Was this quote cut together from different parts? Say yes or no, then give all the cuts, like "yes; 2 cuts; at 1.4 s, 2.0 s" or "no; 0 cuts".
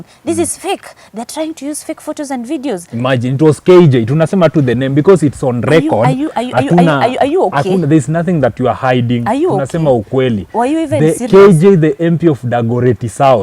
no; 0 cuts